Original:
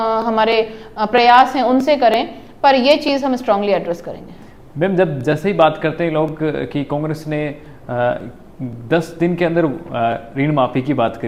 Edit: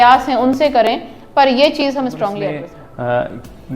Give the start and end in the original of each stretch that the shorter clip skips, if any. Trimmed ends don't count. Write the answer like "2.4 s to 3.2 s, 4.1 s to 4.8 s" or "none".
3.7 s to 7.4 s